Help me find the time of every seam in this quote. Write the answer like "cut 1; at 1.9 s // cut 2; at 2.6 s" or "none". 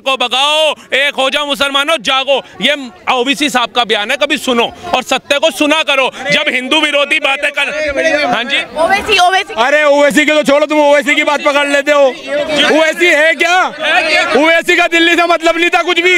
none